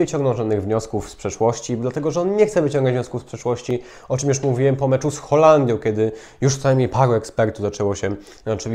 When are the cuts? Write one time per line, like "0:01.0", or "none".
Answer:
none